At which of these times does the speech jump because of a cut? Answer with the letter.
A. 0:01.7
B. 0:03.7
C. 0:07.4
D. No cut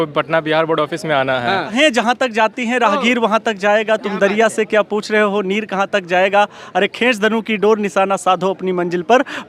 A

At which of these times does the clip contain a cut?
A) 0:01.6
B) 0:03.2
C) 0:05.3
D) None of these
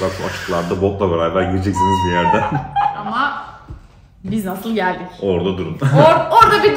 B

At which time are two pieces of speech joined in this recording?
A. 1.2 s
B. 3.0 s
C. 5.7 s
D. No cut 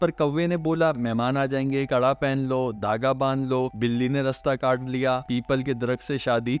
D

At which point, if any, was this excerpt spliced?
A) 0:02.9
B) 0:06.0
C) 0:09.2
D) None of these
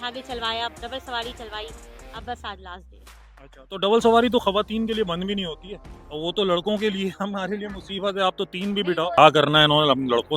C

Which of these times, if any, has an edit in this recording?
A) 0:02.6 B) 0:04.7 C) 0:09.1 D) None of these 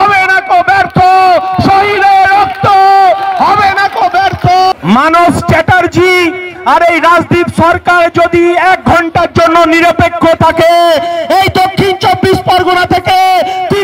B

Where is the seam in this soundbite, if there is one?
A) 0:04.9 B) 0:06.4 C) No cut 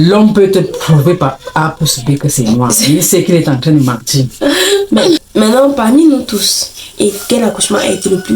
A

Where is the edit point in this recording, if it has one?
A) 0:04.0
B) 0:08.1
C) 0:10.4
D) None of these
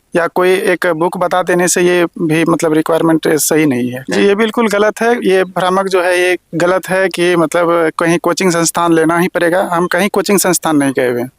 A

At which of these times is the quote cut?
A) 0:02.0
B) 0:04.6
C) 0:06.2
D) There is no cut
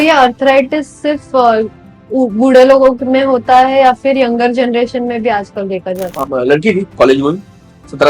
C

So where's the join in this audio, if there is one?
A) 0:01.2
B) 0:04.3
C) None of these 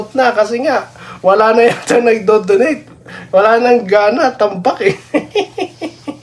C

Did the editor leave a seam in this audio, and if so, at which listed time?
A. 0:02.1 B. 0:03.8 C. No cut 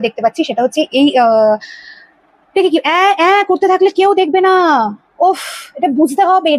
C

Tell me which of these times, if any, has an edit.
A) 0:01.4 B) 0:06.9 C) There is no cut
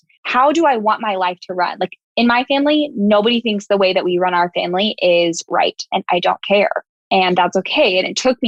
C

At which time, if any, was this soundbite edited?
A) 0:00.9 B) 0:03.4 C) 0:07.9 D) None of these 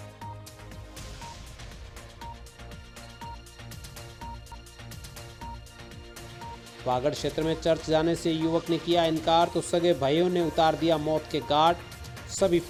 D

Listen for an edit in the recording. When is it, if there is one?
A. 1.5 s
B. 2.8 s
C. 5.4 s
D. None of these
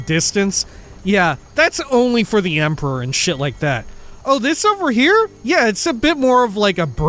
C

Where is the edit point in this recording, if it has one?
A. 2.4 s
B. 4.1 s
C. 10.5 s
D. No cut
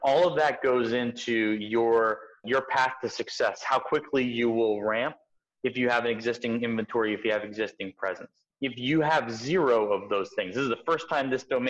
D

